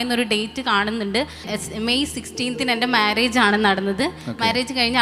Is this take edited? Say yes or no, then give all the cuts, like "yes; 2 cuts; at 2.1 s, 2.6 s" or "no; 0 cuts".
no; 0 cuts